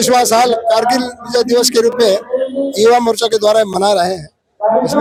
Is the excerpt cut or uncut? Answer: uncut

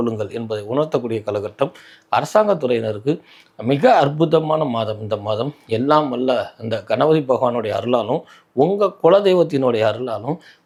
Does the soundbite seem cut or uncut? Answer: uncut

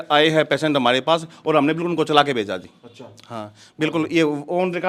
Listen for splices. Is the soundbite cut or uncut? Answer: uncut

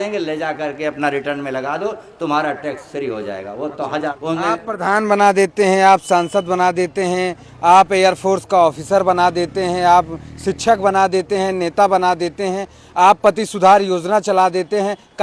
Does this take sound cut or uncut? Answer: cut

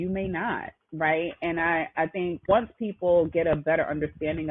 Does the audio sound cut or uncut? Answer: cut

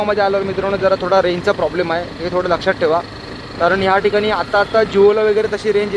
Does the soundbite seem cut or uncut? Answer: uncut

